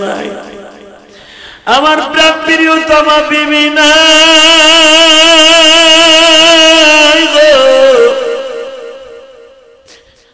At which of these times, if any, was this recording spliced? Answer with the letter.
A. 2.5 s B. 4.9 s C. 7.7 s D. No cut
D